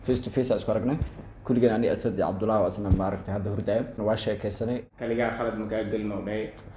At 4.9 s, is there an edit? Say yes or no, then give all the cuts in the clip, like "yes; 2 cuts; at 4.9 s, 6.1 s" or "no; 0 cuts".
yes; 1 cut; at 4.9 s